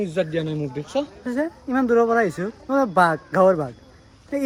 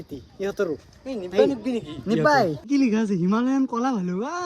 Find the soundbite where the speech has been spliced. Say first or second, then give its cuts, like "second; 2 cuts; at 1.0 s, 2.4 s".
second; 1 cut; at 2.6 s